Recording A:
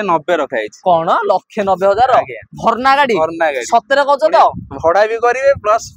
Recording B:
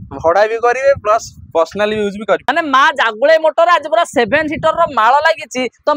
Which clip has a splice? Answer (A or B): B